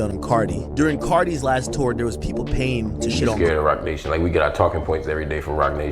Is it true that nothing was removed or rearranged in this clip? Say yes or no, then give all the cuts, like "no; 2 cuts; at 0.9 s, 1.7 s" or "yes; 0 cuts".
no; 1 cut; at 3.4 s